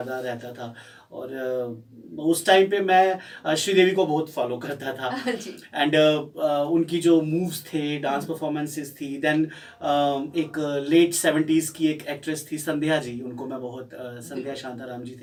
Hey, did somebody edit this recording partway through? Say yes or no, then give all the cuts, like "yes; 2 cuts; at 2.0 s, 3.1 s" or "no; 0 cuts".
no; 0 cuts